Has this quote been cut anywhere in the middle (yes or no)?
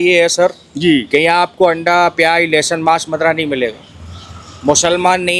no